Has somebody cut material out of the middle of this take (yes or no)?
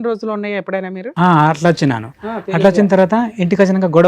no